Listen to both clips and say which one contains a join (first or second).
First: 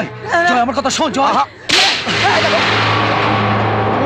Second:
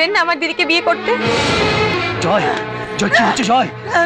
second